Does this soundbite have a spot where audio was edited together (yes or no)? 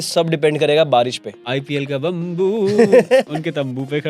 yes